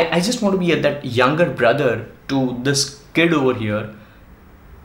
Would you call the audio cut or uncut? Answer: uncut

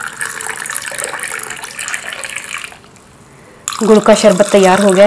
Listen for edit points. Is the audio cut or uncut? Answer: uncut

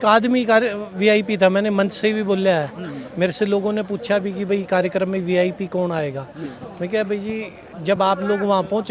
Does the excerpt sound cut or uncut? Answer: uncut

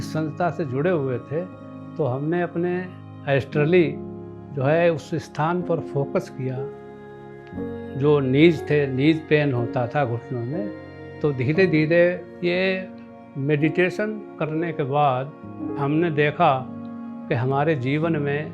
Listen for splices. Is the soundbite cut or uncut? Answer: cut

